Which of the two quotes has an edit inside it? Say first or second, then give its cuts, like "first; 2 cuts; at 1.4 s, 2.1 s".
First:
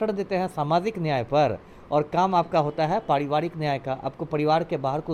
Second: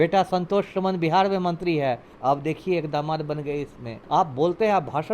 second; 2 cuts; at 2.1 s, 3.9 s